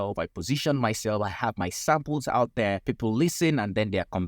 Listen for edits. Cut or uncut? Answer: cut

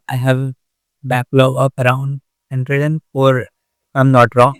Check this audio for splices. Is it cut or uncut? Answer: uncut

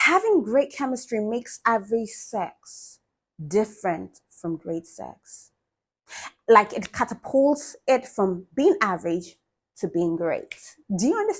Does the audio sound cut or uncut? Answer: uncut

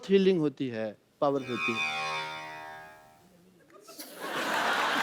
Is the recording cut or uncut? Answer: uncut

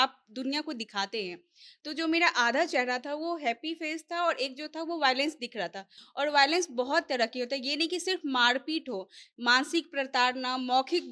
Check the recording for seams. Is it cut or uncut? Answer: cut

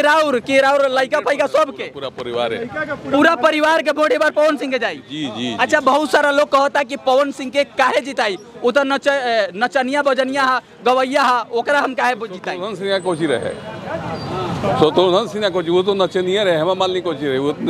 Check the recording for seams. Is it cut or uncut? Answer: uncut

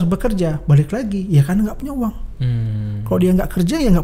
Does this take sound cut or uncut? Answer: uncut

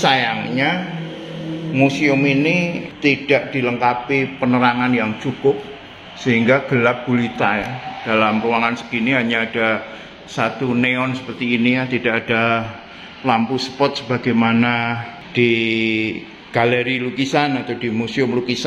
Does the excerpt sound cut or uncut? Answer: cut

